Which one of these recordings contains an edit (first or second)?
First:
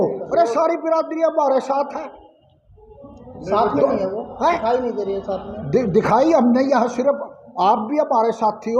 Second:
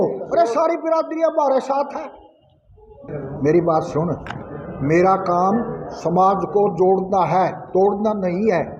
second